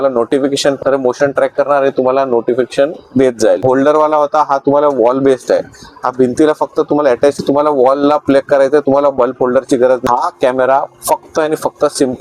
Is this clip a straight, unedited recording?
no; 4 cuts; at 0.8 s, 3.6 s, 7.4 s, 10.0 s

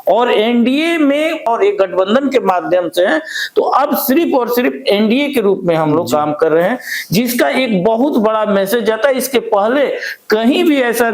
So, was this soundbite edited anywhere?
yes; 1 cut; at 1.5 s

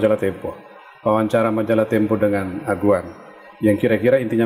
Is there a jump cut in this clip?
no; 0 cuts

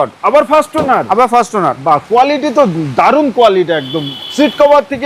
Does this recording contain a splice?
no; 0 cuts

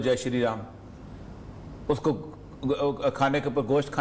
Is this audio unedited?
yes; 0 cuts

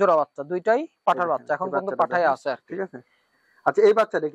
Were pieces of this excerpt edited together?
no; 0 cuts

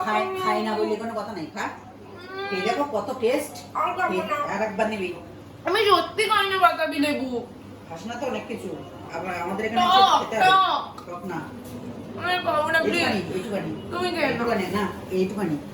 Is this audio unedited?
yes; 0 cuts

